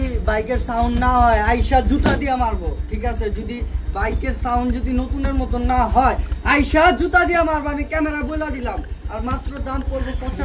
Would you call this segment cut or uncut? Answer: uncut